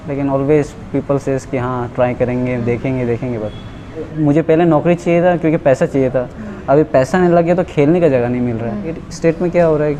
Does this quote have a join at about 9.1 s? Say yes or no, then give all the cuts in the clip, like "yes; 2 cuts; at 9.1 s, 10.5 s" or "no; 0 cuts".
yes; 2 cuts; at 4.1 s, 9.1 s